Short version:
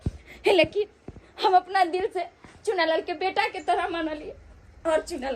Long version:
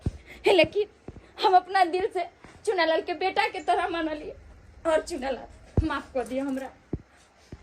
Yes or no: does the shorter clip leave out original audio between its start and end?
no